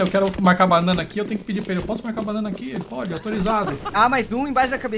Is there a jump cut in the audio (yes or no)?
yes